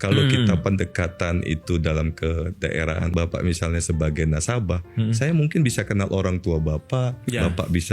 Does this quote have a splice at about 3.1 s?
yes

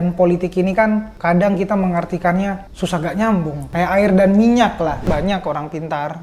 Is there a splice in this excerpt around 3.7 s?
yes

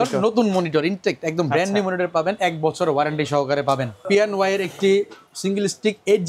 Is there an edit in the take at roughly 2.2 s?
no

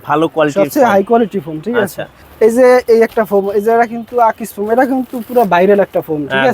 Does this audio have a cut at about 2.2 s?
yes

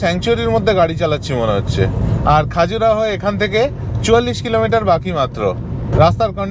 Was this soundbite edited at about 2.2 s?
no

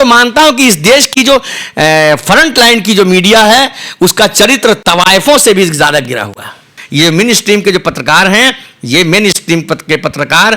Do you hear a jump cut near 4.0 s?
no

